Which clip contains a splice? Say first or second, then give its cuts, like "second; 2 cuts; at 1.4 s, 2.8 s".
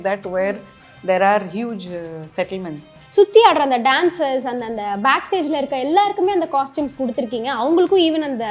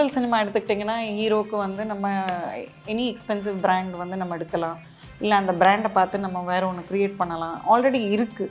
first; 1 cut; at 3.0 s